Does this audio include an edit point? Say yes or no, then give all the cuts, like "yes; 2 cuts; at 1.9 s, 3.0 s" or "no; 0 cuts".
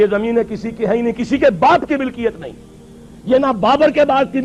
no; 0 cuts